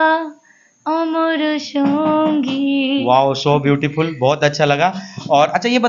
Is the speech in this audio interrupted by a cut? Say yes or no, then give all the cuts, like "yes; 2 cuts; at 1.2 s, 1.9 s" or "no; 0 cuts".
no; 0 cuts